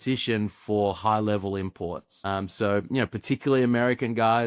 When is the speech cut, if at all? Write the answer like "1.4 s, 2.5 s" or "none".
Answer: 2.1 s